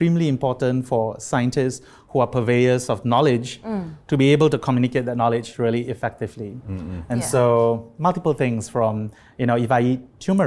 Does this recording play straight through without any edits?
yes; 0 cuts

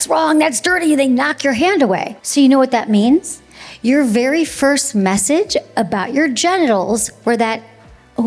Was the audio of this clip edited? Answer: yes; 1 cut; at 2.2 s

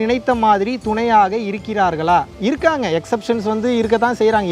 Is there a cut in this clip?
no; 0 cuts

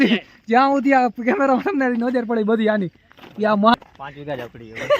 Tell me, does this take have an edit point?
yes; 1 cut; at 3.7 s

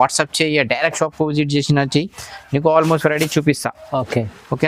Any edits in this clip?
no; 0 cuts

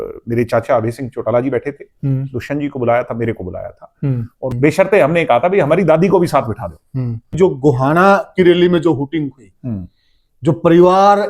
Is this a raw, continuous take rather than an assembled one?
no; 2 cuts; at 4.4 s, 7.2 s

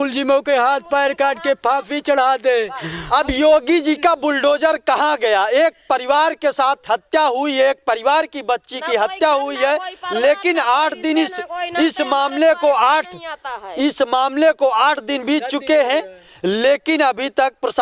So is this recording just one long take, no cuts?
yes; 0 cuts

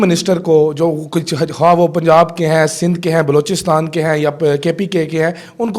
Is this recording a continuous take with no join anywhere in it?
yes; 0 cuts

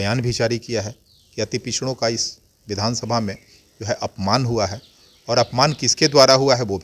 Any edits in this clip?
no; 0 cuts

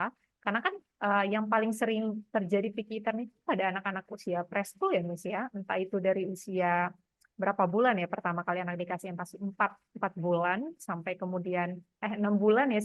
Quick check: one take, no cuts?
yes; 0 cuts

